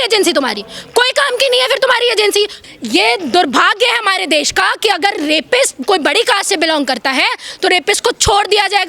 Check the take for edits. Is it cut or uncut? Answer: cut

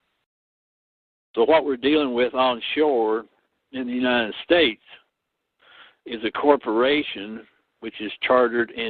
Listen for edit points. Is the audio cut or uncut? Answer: uncut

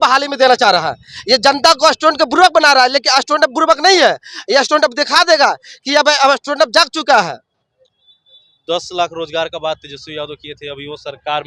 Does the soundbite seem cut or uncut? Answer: uncut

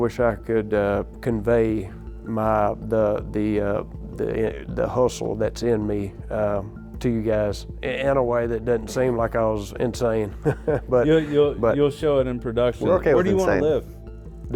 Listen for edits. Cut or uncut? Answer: uncut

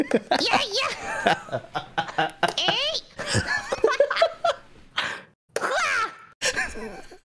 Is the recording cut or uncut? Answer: uncut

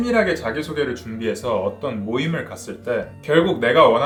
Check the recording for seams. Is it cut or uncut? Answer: uncut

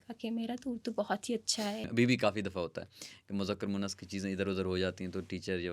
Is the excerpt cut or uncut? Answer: cut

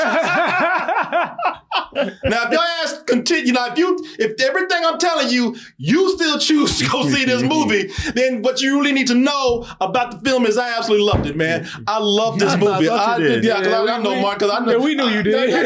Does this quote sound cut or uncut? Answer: cut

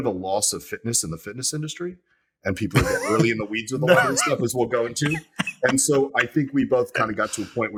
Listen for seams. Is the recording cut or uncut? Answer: uncut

